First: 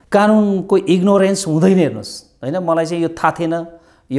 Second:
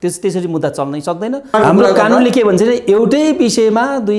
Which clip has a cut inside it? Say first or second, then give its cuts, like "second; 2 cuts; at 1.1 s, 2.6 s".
second; 1 cut; at 1.5 s